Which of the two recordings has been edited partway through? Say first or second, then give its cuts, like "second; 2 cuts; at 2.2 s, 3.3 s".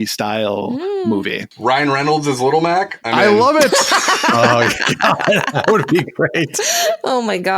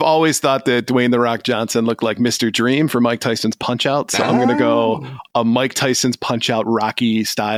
first; 1 cut; at 1.4 s